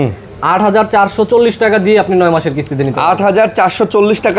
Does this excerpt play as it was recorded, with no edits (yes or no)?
yes